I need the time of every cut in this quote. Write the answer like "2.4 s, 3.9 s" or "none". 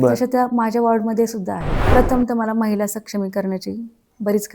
1.8 s